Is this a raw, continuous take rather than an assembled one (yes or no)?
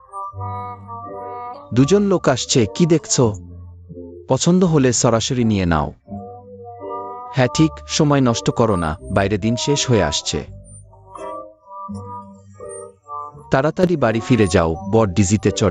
yes